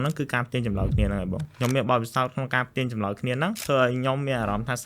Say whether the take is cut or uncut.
cut